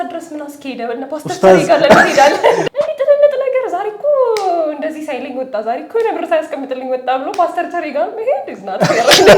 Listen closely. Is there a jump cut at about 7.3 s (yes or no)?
no